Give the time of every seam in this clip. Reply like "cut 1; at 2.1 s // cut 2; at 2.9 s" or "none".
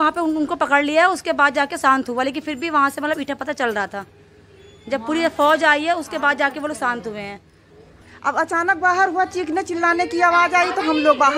none